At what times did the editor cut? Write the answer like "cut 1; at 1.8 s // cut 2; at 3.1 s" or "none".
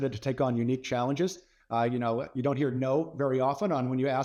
none